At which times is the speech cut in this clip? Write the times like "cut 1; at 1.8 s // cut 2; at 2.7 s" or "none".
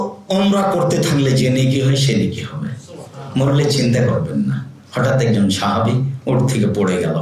none